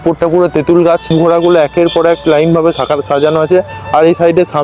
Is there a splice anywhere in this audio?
yes; 1 cut; at 1.1 s

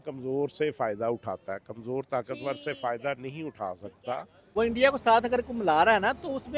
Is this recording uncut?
no; 1 cut; at 4.3 s

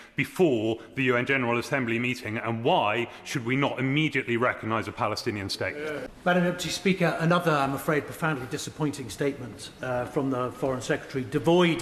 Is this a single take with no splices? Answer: no; 1 cut; at 6.1 s

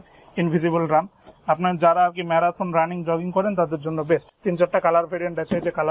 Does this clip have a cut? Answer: no; 0 cuts

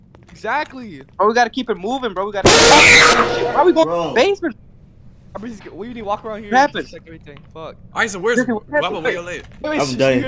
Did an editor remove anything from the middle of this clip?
yes; 1 cut; at 4.1 s

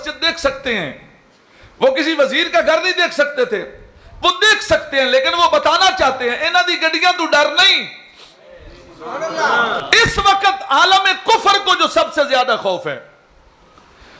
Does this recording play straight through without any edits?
no; 1 cut; at 9.8 s

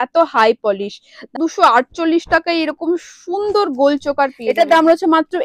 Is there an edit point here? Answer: yes; 2 cuts; at 1.3 s, 4.4 s

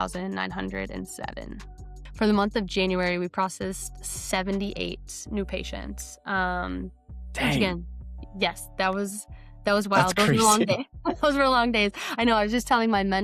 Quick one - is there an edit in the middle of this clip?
no; 0 cuts

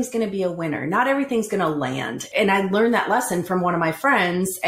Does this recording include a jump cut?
yes; 1 cut; at 2.2 s

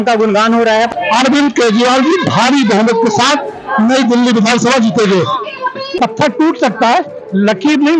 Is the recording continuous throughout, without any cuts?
no; 2 cuts; at 0.9 s, 6.0 s

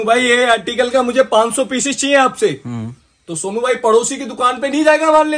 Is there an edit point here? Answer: no; 0 cuts

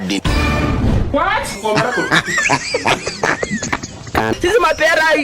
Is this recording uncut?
no; 1 cut; at 4.3 s

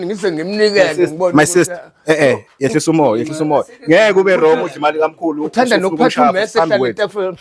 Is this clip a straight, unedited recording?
yes; 0 cuts

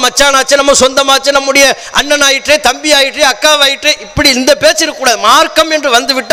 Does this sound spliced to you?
no; 0 cuts

